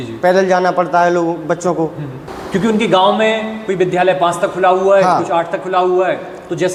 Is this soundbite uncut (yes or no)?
yes